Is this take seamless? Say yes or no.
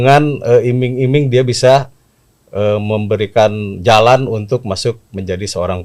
yes